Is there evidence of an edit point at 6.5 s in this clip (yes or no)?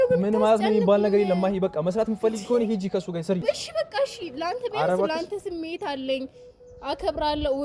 no